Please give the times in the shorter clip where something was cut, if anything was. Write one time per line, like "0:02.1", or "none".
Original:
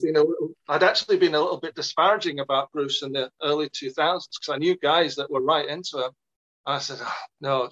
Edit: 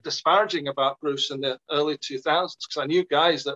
none